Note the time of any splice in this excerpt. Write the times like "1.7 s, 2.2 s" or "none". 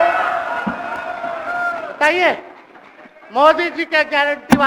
none